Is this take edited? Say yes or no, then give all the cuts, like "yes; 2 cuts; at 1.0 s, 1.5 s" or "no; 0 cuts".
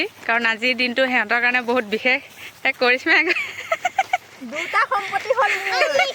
no; 0 cuts